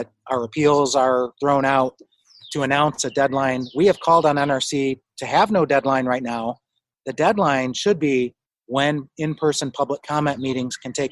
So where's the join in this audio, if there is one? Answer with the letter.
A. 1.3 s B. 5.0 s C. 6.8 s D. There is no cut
A